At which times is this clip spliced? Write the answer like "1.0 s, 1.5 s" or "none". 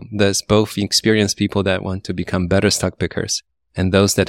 none